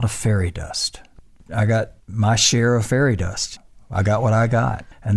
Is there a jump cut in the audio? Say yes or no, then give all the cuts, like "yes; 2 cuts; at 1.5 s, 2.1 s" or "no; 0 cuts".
yes; 1 cut; at 3.5 s